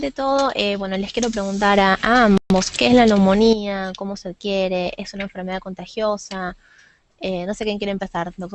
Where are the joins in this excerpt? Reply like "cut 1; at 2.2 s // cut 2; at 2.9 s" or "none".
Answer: cut 1; at 3.5 s